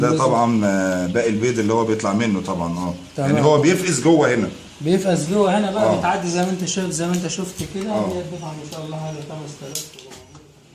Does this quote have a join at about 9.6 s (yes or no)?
no